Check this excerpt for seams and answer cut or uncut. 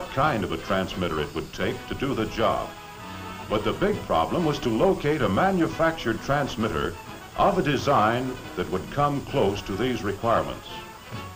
uncut